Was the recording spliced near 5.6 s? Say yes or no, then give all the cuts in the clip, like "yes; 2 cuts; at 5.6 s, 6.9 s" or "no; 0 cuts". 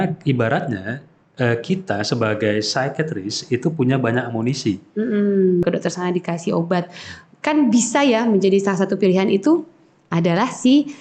yes; 1 cut; at 5.6 s